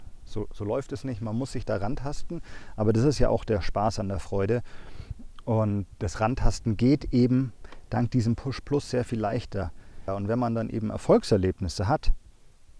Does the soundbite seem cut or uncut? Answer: cut